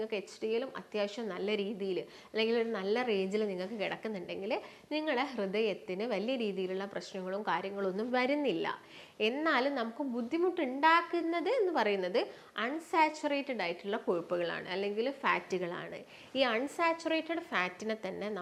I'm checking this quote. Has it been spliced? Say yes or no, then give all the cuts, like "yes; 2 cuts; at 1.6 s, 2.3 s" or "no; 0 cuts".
no; 0 cuts